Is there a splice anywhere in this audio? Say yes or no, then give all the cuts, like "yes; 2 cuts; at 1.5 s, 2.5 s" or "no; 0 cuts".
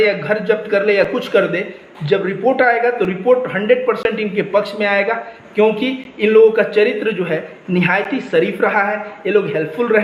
no; 0 cuts